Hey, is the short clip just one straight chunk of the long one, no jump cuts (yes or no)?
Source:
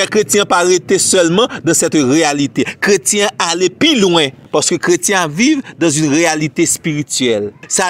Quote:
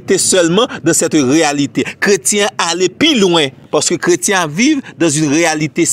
yes